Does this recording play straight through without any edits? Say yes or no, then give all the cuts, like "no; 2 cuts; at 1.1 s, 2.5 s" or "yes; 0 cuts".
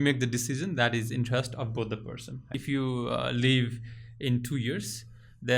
no; 1 cut; at 2.5 s